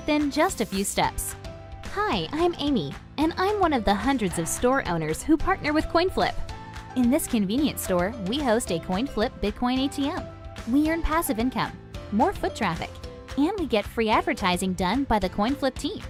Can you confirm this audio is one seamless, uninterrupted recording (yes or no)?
yes